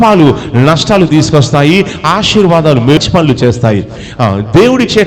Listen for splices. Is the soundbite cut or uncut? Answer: cut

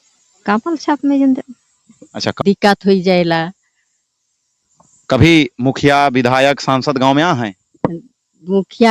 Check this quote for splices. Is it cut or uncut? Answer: cut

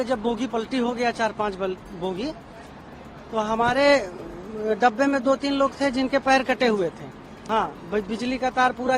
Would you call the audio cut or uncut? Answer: cut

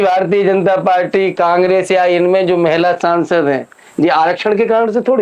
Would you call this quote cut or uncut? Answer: uncut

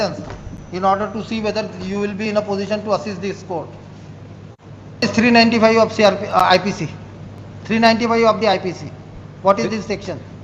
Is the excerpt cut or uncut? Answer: cut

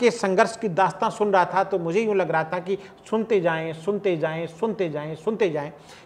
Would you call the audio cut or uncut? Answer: uncut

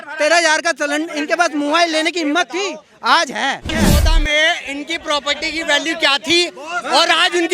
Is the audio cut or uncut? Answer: cut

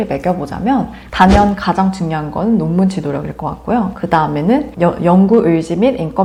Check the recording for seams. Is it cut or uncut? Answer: uncut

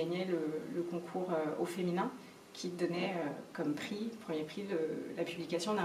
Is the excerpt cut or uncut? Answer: uncut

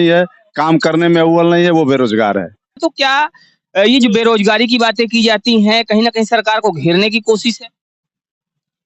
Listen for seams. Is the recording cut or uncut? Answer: cut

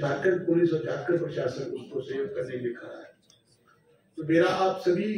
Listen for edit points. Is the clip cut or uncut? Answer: uncut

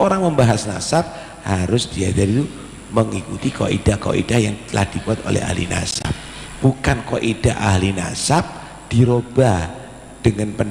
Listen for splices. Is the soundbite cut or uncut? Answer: uncut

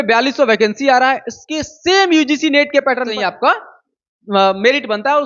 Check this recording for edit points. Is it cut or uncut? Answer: cut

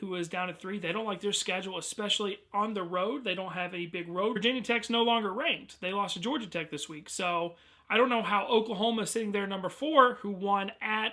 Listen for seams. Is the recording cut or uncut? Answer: uncut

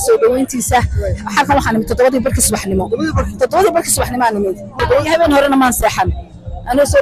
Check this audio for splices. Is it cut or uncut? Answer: cut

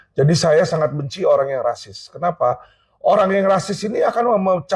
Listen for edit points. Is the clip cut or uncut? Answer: uncut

